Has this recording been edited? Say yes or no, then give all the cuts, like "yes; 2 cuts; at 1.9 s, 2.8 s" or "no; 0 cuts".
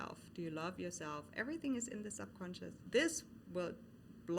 yes; 1 cut; at 2.8 s